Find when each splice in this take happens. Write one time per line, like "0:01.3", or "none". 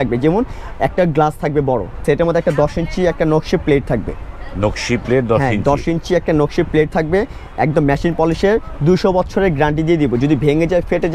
0:02.0